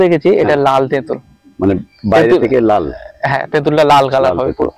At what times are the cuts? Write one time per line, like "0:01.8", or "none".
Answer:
none